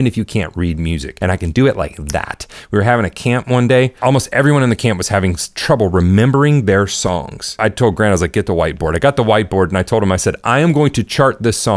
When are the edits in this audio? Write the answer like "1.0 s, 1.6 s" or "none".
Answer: 1.1 s, 4.0 s, 7.5 s